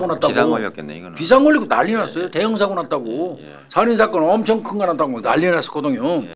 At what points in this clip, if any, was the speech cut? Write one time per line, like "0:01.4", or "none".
none

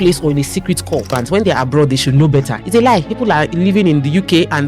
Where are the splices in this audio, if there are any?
0:01.2

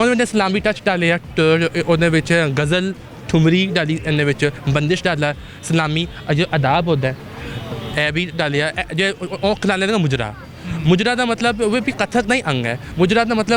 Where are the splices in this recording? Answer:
none

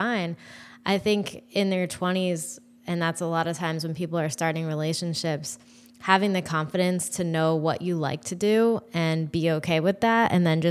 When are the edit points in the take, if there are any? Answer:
none

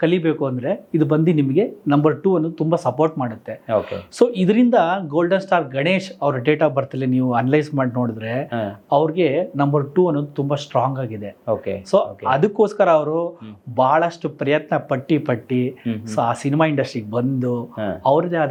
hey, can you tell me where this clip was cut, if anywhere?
none

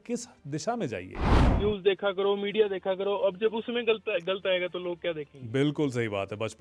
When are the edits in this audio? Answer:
0:01.4

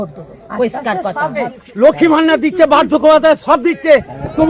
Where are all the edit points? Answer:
0:01.6

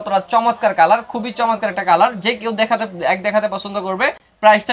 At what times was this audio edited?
none

